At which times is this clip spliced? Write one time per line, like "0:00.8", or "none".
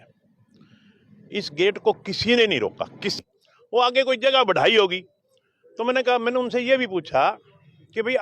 0:03.2